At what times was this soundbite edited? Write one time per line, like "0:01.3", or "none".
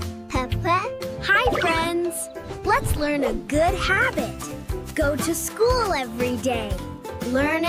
none

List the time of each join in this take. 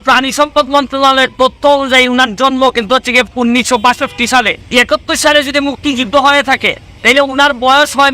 0:04.6

